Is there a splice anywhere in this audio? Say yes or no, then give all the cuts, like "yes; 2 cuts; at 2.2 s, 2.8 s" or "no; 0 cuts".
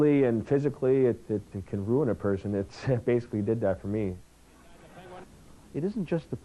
yes; 1 cut; at 5.3 s